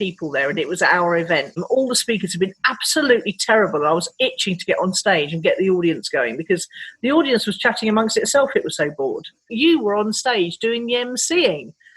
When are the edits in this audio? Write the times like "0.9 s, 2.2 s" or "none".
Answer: 1.6 s, 9.5 s